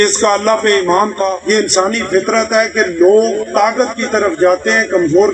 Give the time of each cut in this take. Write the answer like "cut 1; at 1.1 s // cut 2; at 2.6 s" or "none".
cut 1; at 1.3 s

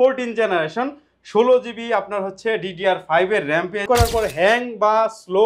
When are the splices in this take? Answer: cut 1; at 3.8 s

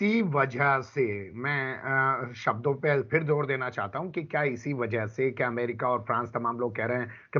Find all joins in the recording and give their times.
none

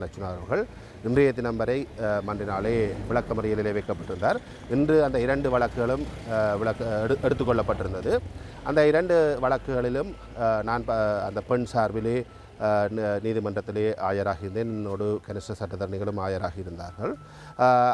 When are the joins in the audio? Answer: none

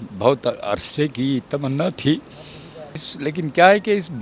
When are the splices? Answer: cut 1; at 3.0 s

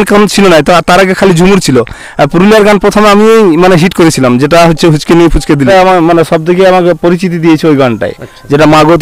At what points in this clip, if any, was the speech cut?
cut 1; at 5.7 s

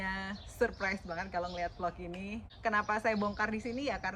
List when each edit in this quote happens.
cut 1; at 2.5 s

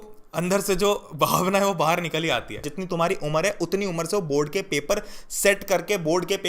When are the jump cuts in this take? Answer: cut 1; at 2.7 s

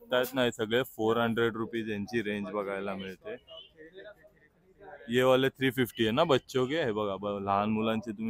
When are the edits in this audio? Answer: none

